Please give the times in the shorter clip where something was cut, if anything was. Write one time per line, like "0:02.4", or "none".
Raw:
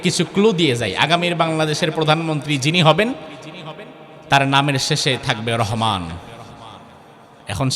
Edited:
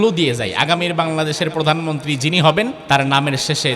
0:02.8